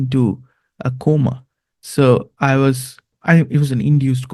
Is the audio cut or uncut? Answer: cut